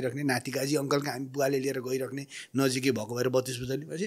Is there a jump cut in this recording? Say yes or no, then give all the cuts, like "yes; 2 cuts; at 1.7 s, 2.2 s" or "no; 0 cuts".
no; 0 cuts